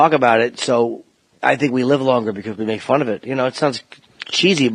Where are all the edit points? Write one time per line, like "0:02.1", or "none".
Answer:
none